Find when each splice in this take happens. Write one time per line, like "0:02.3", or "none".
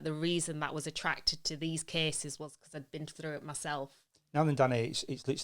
0:04.0